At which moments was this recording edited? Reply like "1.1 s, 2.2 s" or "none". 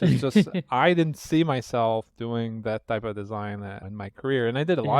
3.8 s

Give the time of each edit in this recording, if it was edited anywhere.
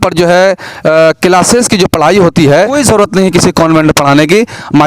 2.8 s

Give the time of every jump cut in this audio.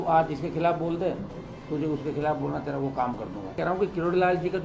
3.5 s

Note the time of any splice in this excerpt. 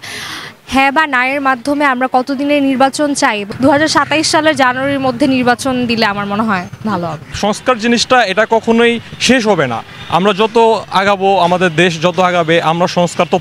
3.5 s, 7.4 s

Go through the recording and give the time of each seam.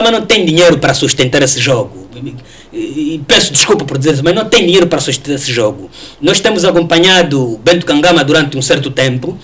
none

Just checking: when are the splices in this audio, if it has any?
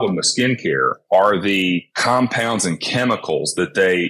1.0 s, 1.9 s

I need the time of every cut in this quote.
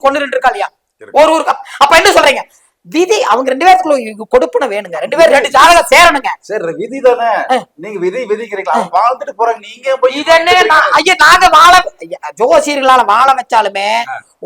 none

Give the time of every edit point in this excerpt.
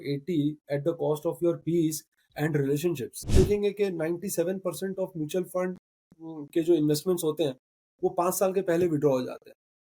3.3 s

